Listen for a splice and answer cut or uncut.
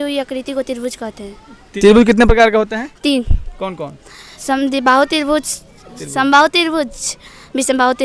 uncut